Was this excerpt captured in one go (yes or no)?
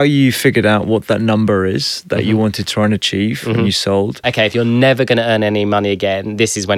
no